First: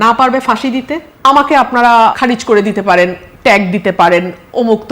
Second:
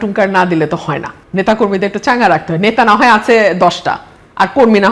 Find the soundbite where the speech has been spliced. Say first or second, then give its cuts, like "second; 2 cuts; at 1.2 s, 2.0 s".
first; 2 cuts; at 1.0 s, 2.2 s